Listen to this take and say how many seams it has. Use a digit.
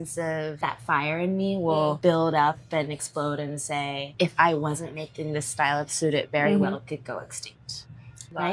1